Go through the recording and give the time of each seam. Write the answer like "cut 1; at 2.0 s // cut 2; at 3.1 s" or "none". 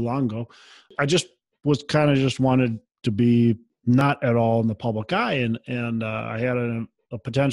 cut 1; at 0.9 s // cut 2; at 4.0 s